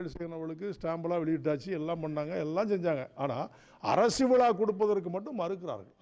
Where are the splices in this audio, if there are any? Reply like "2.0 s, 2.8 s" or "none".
none